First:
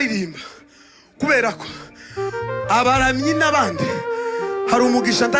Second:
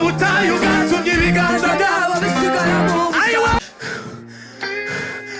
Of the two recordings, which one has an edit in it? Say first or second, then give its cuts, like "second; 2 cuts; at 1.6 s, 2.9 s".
second; 1 cut; at 3.6 s